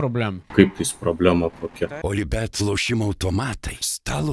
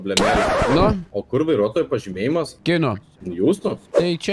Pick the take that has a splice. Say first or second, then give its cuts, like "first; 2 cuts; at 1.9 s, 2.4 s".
first; 1 cut; at 2.0 s